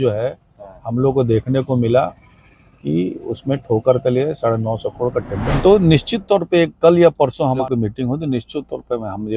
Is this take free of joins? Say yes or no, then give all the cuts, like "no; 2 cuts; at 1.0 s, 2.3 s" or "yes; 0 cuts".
no; 1 cut; at 5.5 s